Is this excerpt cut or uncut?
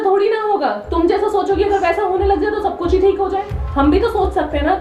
uncut